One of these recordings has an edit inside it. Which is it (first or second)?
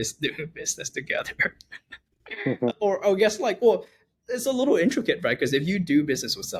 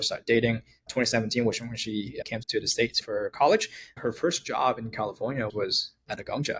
second